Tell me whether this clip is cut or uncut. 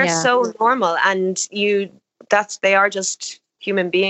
uncut